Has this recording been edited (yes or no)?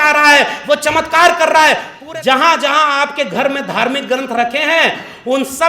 yes